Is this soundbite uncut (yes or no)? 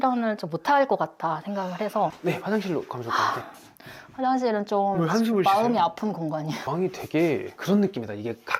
no